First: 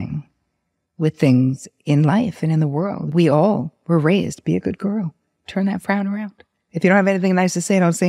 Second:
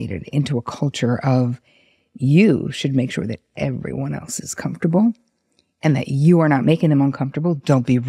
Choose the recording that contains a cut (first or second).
first